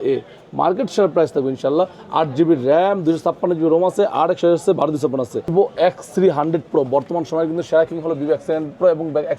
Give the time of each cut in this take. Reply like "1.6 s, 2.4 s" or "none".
5.5 s